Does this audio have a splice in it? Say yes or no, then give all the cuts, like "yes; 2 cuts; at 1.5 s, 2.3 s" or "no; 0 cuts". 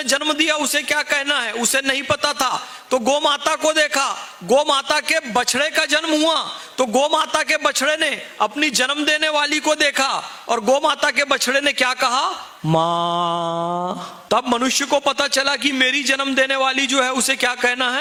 no; 0 cuts